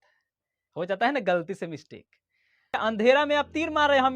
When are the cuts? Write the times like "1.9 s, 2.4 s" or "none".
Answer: 2.8 s